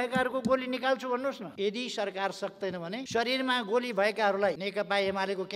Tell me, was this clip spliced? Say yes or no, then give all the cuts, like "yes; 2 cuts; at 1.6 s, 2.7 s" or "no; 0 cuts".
yes; 3 cuts; at 1.5 s, 3.0 s, 4.6 s